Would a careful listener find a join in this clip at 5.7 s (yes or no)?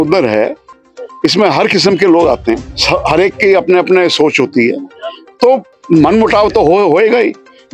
yes